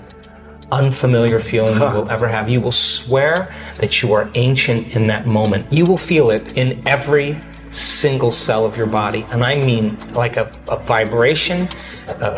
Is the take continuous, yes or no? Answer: no